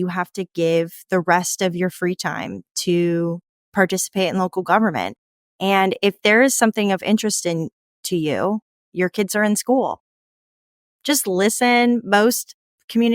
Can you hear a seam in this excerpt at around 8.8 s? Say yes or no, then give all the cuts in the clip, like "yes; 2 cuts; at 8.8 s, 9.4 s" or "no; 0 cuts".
yes; 1 cut; at 8.8 s